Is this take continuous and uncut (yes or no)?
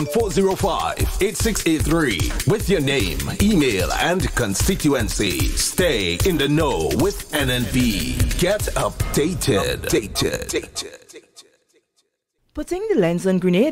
no